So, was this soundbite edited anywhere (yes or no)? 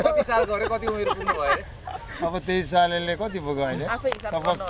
no